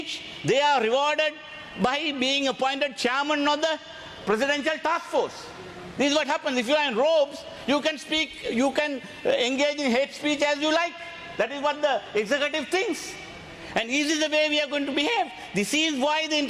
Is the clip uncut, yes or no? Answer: yes